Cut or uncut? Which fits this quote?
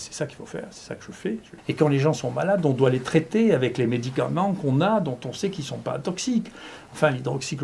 cut